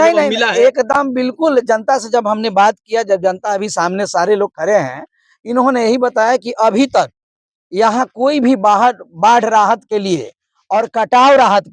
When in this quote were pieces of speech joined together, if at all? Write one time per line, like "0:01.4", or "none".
none